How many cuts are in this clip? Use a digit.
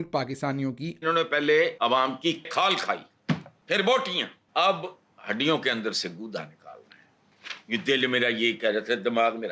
2